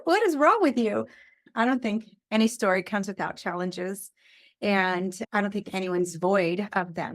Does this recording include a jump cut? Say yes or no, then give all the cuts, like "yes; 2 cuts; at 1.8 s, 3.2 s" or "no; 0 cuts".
yes; 1 cut; at 1.4 s